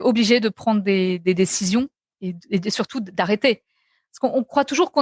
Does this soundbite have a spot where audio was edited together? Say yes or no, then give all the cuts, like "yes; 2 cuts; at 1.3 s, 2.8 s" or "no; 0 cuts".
no; 0 cuts